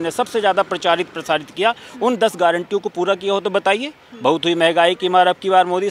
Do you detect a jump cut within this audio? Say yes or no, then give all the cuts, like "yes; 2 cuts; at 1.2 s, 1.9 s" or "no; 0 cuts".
no; 0 cuts